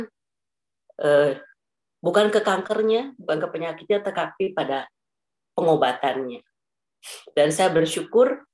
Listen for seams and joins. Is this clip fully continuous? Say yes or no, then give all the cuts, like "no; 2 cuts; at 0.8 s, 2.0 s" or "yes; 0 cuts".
yes; 0 cuts